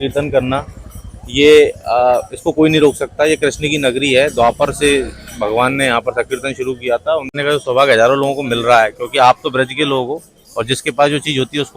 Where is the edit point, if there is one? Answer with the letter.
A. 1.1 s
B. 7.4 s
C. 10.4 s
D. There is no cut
B